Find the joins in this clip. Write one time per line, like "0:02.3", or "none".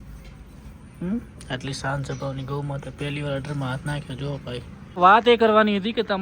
0:04.9